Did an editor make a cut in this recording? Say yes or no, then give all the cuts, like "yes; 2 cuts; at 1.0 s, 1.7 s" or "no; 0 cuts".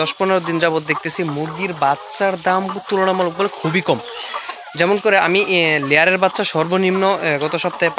no; 0 cuts